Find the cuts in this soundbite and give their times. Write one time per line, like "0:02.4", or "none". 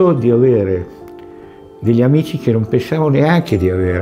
none